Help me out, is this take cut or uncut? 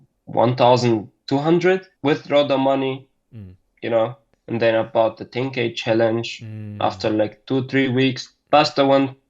cut